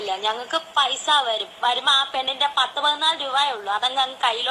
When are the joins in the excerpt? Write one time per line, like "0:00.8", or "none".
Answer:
none